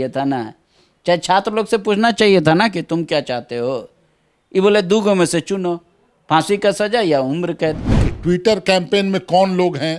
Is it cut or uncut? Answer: cut